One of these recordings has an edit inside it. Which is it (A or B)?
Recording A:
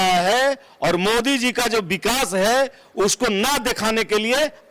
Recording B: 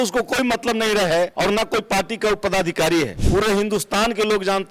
B